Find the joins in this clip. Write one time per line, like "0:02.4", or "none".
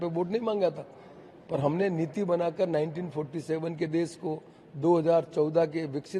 none